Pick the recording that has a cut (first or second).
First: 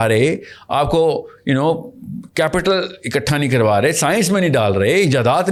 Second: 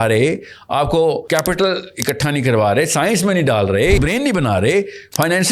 second